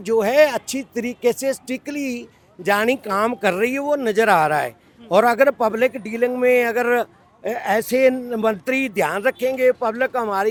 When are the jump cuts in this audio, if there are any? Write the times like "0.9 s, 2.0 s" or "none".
none